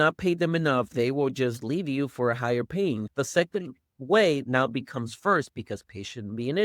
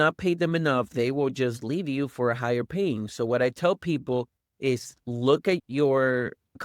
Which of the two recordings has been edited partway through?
first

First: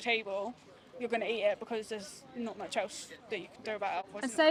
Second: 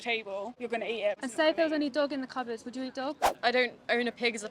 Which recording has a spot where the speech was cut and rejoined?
second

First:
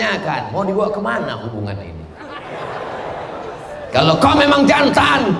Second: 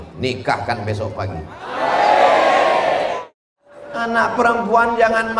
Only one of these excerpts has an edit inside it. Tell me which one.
second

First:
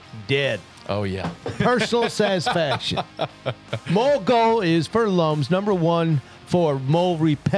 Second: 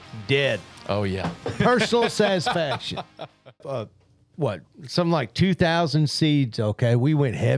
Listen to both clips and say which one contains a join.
second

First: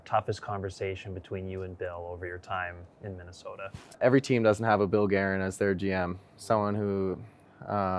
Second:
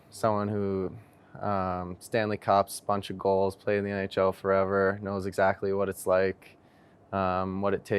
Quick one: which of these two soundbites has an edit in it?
first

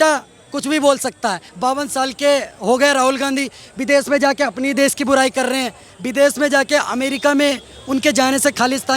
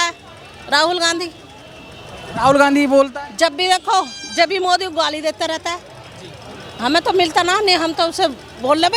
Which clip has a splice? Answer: first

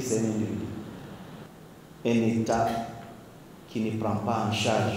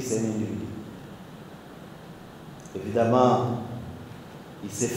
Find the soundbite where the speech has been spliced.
first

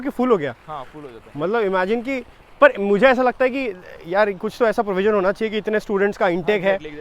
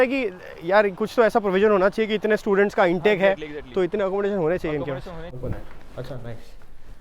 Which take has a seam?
second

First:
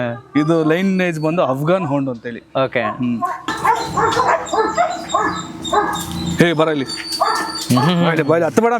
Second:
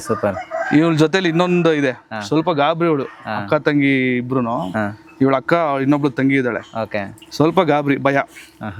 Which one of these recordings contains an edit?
first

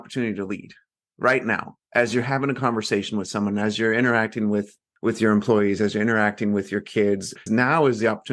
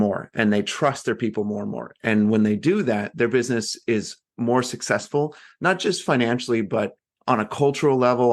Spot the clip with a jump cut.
first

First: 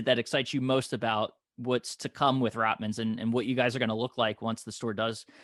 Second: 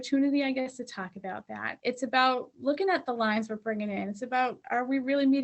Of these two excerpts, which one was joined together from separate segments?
second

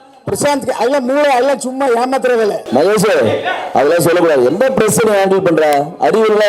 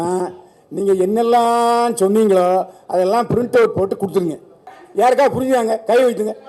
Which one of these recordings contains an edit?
first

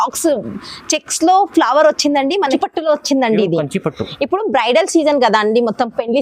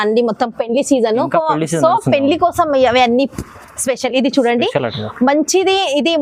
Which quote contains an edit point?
first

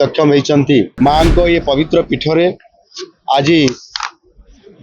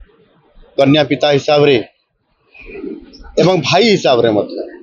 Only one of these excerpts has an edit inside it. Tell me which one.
first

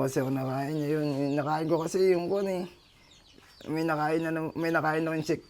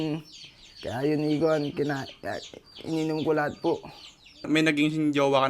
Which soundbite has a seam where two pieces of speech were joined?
second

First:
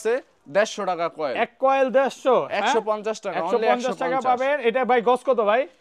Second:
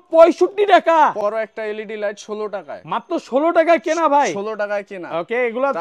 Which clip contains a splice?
second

